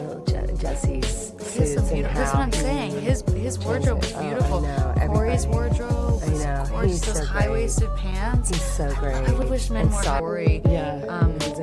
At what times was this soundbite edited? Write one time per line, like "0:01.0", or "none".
0:10.2